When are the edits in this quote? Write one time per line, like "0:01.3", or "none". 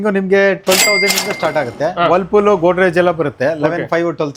none